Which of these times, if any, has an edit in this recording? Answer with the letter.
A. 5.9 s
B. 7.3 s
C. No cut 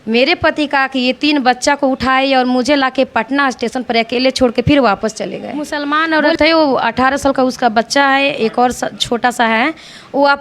A